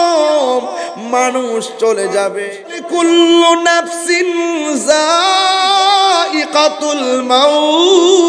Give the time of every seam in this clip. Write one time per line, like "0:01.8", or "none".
0:02.7

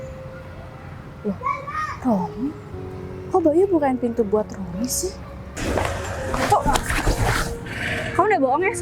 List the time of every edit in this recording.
0:05.5

